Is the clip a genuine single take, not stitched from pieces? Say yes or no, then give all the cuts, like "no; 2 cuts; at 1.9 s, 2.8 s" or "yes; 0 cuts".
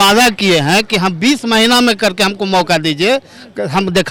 yes; 0 cuts